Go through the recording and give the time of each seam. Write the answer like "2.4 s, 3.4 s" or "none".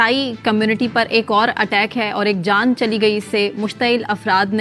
none